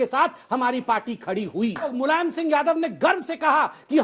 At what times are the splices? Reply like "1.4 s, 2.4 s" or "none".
1.9 s